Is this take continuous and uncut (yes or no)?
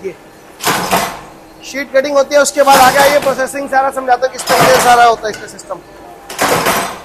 yes